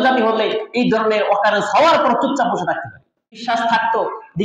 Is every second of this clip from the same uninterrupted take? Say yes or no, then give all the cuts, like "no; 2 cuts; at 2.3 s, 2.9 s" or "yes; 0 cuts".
no; 1 cut; at 3.4 s